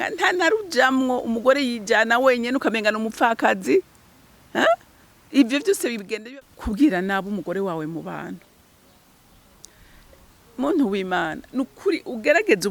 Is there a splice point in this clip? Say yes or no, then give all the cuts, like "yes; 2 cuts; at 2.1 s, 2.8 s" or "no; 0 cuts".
yes; 1 cut; at 6.1 s